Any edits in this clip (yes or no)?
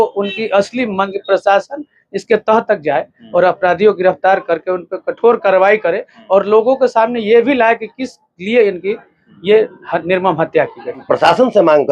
yes